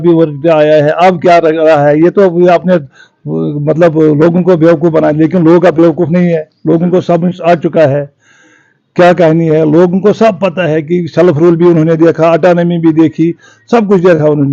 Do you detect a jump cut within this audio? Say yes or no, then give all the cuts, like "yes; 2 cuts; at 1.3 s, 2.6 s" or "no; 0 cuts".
no; 0 cuts